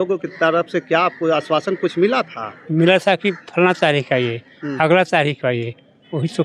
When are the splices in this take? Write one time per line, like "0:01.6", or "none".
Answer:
none